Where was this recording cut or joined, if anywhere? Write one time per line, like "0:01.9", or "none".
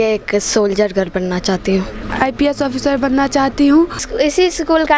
0:01.9
0:04.1